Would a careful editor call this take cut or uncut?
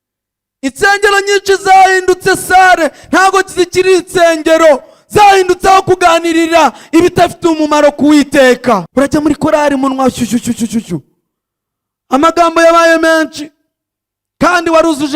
cut